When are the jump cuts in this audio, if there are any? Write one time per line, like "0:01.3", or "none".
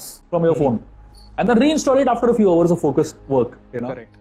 none